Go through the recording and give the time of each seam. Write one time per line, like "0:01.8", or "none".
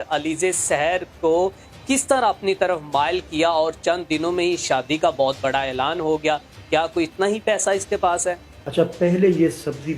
0:08.7